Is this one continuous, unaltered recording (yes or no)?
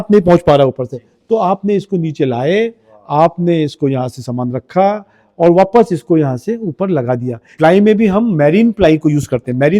no